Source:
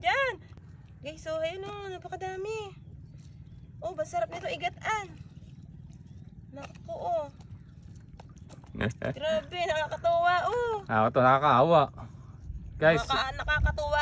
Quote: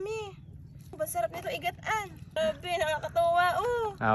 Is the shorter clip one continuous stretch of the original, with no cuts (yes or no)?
no